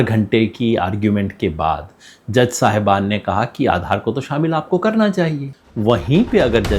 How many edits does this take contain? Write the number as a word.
one